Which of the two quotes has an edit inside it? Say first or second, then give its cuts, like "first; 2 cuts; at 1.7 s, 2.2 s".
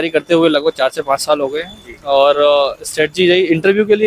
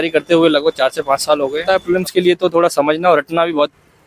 second; 1 cut; at 1.6 s